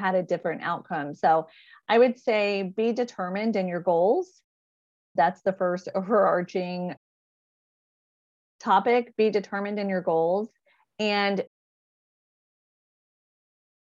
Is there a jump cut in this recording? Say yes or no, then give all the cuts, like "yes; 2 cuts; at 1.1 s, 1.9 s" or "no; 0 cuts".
no; 0 cuts